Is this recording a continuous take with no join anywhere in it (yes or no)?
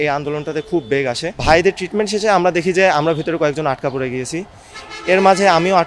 no